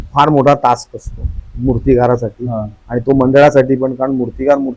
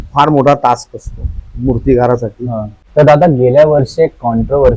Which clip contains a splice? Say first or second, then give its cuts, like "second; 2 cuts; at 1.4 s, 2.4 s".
second; 1 cut; at 2.8 s